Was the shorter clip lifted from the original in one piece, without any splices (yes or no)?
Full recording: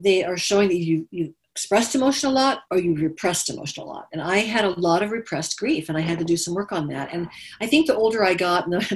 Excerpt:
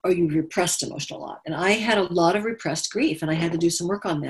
yes